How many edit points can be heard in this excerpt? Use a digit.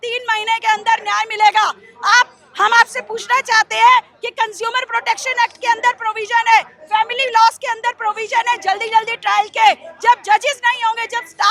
0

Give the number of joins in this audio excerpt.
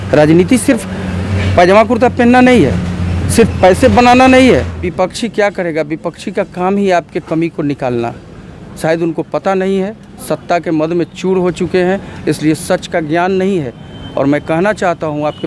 1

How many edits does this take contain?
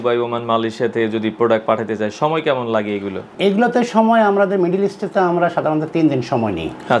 1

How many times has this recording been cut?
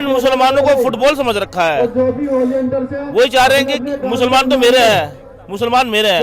0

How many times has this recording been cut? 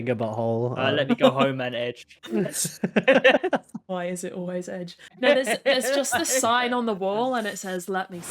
1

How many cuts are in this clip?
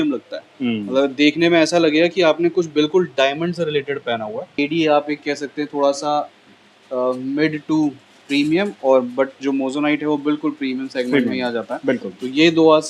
1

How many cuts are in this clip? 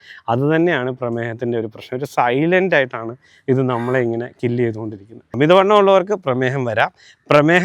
1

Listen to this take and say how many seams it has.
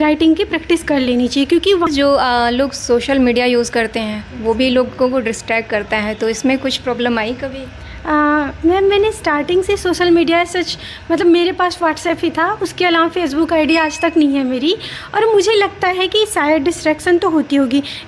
1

